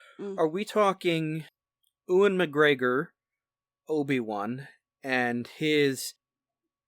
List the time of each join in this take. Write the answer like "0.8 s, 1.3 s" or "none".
1.5 s